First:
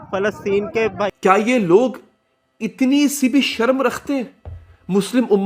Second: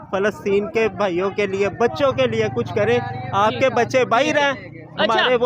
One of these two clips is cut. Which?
first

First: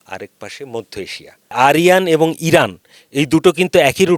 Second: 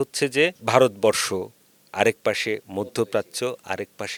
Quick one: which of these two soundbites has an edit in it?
first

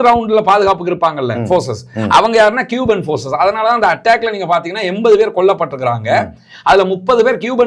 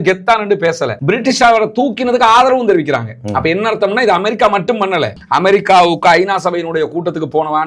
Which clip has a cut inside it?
second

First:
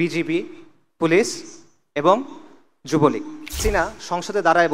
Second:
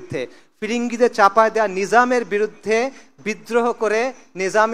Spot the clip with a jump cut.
first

